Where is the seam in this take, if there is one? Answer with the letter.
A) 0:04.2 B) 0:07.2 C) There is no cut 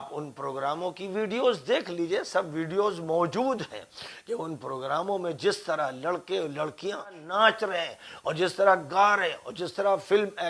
B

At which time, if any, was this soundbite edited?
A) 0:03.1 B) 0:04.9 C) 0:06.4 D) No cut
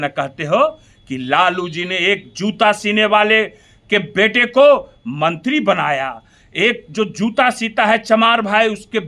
D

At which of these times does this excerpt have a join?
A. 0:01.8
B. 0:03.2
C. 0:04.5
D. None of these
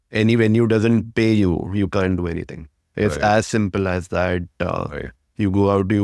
D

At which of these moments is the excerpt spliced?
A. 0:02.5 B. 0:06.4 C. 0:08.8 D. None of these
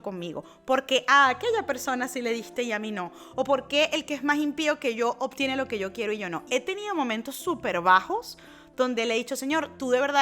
B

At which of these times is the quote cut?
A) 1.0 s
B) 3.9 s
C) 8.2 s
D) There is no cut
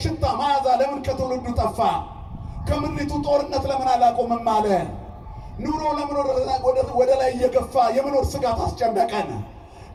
D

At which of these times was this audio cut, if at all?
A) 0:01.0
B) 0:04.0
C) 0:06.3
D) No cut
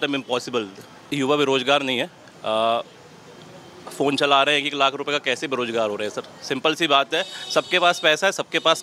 A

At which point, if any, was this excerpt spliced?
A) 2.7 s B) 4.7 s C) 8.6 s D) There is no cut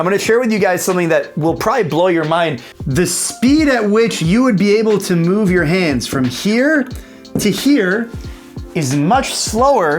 A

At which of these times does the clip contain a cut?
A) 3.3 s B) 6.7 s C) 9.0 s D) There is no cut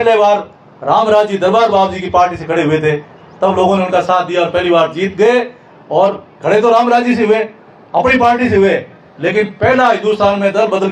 D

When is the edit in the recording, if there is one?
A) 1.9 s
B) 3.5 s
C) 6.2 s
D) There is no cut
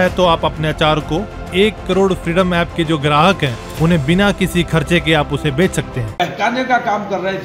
C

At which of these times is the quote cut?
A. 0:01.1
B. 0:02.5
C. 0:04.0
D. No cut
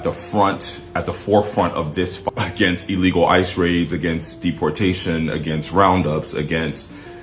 D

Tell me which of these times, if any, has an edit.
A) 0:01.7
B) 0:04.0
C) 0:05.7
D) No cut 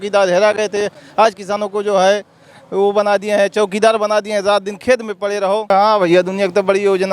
C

